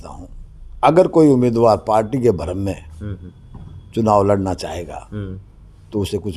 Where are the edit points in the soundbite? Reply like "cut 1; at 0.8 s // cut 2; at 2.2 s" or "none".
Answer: none